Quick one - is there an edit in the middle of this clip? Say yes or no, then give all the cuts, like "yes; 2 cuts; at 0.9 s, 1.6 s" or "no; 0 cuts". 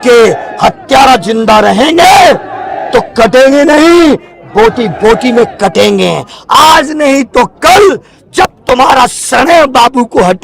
no; 0 cuts